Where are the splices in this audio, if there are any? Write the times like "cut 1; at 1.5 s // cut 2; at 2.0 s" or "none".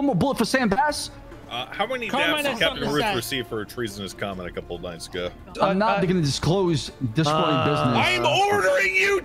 cut 1; at 1.2 s // cut 2; at 5.5 s